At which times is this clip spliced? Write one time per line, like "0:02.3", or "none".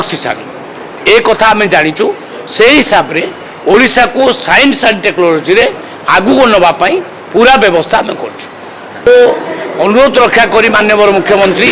0:09.1